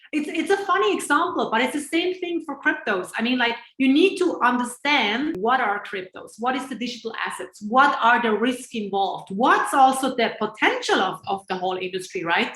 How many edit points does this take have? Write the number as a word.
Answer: one